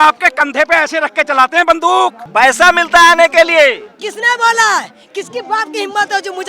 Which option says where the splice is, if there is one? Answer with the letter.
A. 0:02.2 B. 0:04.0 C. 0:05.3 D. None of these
A